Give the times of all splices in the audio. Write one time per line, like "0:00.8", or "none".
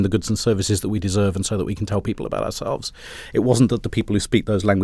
none